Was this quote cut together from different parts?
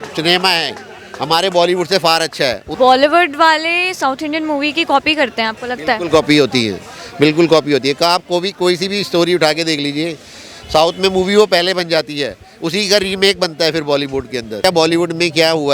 yes; 2 cuts; at 2.6 s, 14.6 s

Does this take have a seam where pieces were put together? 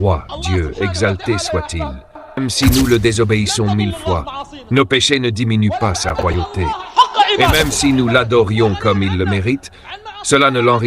yes; 2 cuts; at 2.4 s, 7.5 s

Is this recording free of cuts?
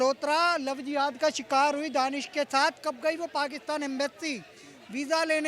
yes; 0 cuts

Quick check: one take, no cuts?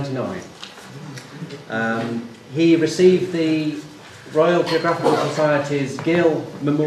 no; 1 cut; at 4.6 s

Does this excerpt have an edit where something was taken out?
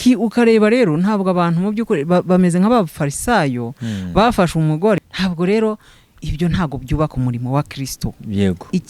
yes; 1 cut; at 5.0 s

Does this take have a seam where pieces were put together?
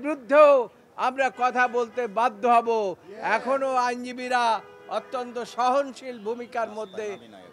no; 0 cuts

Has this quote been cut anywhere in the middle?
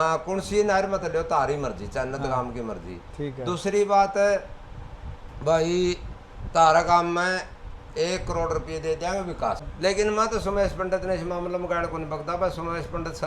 yes; 1 cut; at 9.7 s

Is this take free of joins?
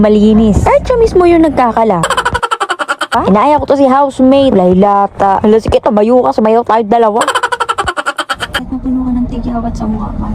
no; 2 cuts; at 3.2 s, 8.6 s

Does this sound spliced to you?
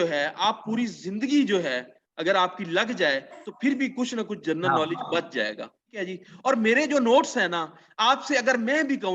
yes; 1 cut; at 5.9 s

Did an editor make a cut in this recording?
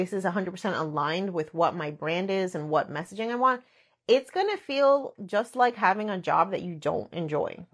no; 0 cuts

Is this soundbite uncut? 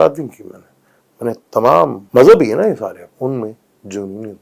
no; 2 cuts; at 2.0 s, 3.0 s

